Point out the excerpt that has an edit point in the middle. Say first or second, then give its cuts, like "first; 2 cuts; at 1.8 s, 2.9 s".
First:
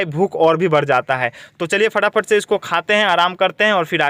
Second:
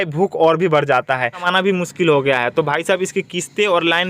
second; 1 cut; at 1.5 s